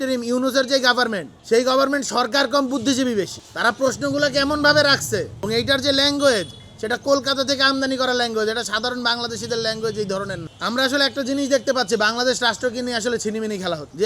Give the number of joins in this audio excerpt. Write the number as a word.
two